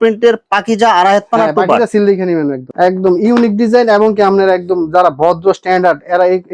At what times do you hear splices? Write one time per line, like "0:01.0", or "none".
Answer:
0:02.7